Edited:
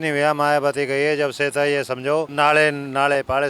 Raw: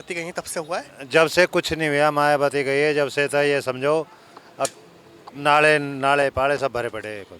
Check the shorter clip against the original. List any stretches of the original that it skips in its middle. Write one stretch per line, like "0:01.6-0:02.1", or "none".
0:04.1-0:05.4

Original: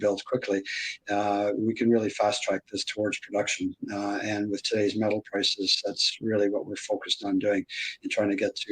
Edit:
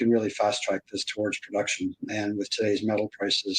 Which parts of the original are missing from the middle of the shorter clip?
0:03.9-0:04.2

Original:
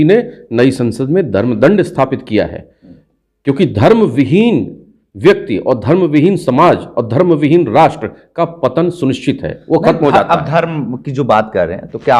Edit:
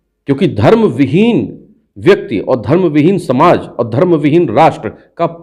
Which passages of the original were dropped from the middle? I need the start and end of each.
none

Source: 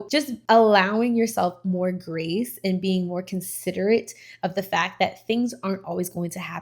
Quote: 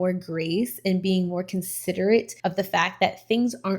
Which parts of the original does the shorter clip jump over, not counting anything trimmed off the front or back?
0:04.1-0:04.3

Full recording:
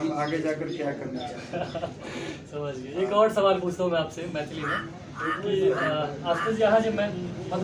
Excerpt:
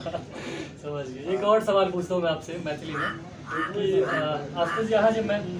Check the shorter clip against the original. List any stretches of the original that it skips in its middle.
none

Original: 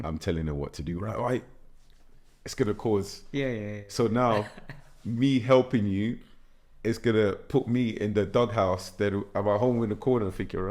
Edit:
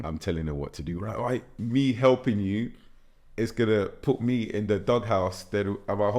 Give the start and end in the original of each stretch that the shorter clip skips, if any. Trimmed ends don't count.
0:01.5-0:05.0

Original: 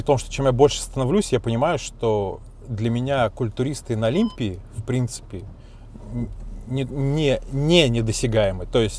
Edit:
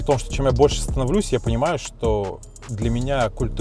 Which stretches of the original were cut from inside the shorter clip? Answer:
none

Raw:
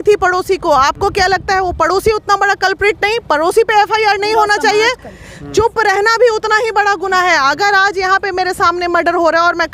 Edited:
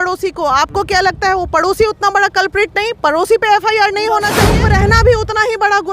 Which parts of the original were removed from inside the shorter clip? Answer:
0:04.8-0:05.7

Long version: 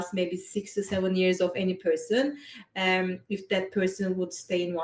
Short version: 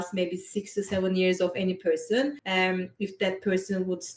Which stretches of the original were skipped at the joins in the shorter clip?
0:02.4-0:02.7

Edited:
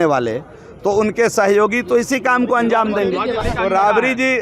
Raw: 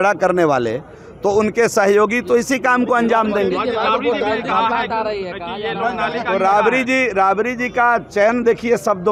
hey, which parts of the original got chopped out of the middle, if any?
0:03.8-0:06.1

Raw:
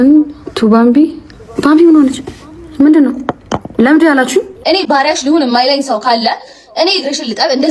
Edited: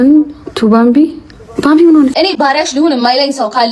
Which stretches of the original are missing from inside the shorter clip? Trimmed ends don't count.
0:02.1-0:04.6

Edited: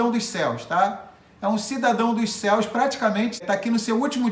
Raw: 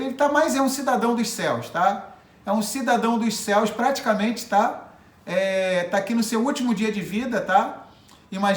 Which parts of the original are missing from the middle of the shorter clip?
0:04.5-0:05.9

